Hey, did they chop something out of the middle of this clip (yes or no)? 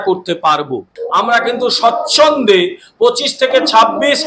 yes